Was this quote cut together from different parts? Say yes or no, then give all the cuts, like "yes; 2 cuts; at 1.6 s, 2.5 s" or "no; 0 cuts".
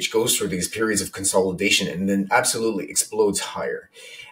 no; 0 cuts